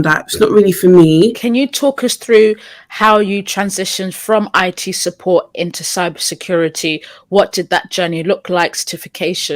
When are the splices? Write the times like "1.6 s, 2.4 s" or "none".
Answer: 1.4 s